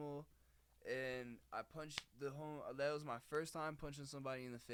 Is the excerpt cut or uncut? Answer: uncut